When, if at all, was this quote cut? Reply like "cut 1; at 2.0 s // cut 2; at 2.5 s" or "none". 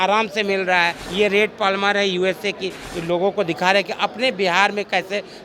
cut 1; at 1.0 s // cut 2; at 2.8 s